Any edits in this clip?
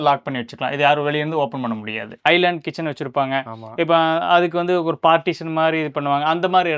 yes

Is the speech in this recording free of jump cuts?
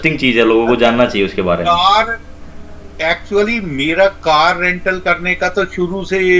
yes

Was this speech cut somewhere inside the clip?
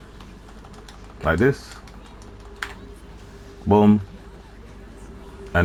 no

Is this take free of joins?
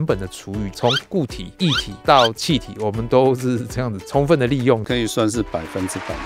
yes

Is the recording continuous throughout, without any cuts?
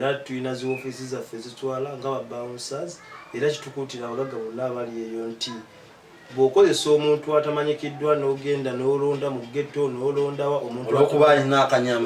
yes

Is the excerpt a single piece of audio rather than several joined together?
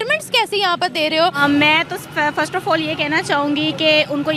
yes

